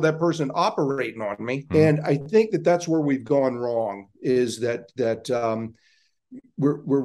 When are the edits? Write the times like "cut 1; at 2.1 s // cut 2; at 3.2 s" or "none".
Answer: cut 1; at 1.6 s